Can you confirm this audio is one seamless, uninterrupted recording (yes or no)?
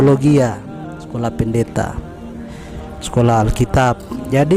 yes